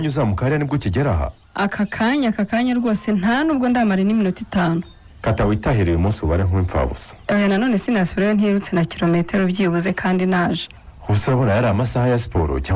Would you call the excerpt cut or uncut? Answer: uncut